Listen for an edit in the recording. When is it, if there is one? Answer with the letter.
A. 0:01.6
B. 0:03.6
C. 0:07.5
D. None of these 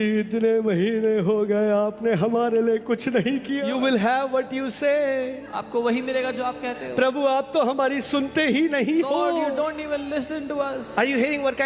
B